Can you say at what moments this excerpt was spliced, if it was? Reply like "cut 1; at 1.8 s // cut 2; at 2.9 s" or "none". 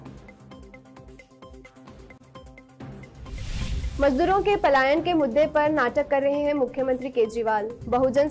cut 1; at 1.1 s // cut 2; at 2.2 s